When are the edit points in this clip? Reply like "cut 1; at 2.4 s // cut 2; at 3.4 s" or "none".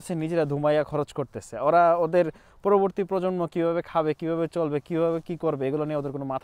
none